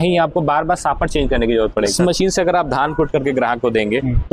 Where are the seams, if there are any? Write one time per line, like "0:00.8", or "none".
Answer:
0:01.9

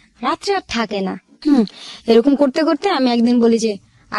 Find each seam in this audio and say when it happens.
0:01.3

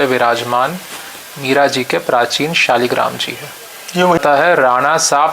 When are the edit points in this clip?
0:04.2

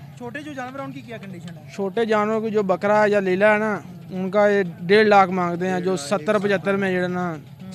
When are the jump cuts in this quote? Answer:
none

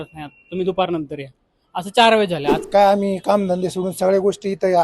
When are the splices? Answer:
0:02.6

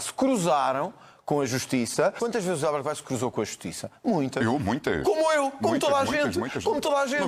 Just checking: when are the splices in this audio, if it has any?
none

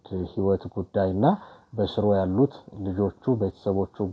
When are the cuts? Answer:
none

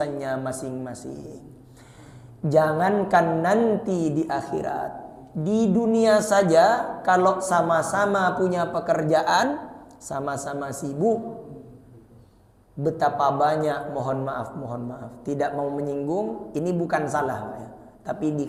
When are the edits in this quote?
none

